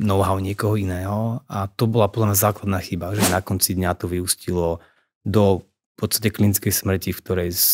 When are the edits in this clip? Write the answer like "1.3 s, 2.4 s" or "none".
3.3 s